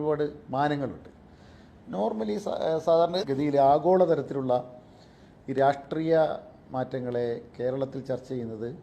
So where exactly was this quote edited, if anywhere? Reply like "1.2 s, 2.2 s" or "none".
3.2 s